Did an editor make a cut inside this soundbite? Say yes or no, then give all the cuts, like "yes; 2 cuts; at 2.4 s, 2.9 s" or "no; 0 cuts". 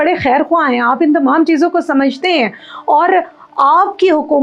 no; 0 cuts